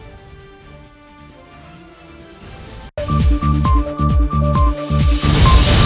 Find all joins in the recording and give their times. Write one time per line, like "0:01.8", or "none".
0:02.9